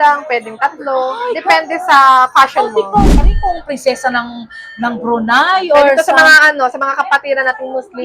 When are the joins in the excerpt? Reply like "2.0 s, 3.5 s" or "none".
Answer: 3.2 s